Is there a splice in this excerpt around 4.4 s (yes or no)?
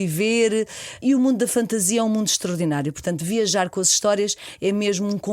no